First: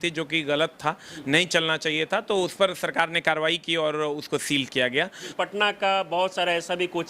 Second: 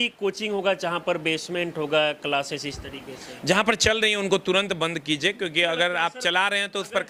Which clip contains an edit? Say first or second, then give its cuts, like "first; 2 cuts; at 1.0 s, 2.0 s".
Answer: first; 1 cut; at 5.3 s